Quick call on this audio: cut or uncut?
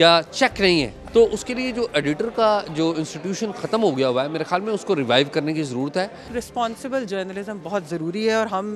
cut